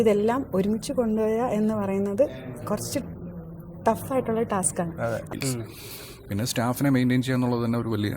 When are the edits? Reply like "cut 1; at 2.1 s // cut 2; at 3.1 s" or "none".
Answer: cut 1; at 5.3 s